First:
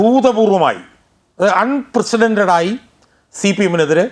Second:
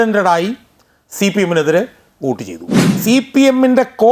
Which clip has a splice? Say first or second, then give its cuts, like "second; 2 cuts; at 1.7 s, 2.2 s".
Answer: second; 1 cut; at 2.9 s